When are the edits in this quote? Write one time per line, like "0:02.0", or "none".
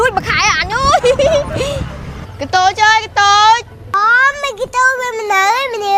none